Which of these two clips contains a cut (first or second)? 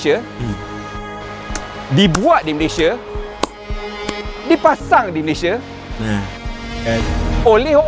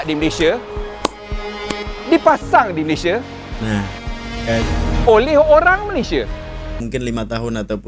second